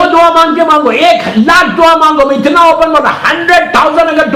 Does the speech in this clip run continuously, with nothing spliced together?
yes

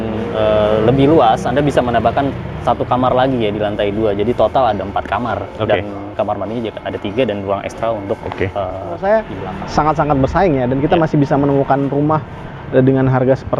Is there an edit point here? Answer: yes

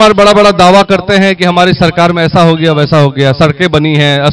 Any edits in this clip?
no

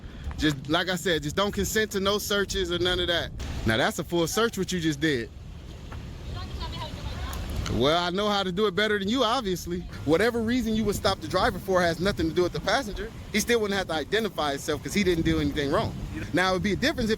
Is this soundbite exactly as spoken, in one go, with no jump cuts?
no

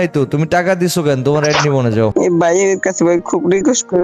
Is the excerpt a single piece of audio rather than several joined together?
no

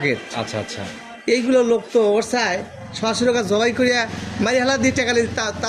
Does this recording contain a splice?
no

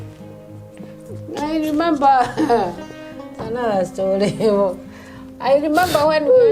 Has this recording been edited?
no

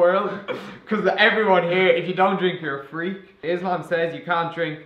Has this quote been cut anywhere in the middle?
yes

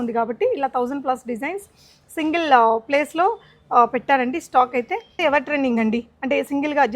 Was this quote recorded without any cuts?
no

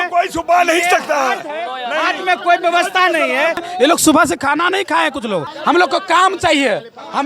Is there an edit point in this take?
yes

